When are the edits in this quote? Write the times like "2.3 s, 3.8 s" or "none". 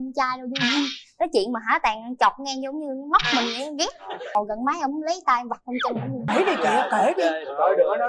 4.3 s, 6.3 s